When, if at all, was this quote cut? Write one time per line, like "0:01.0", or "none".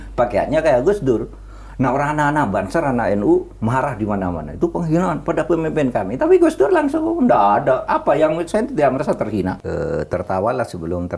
0:09.5